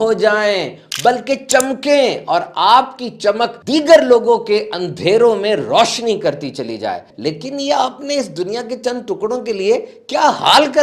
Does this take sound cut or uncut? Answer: cut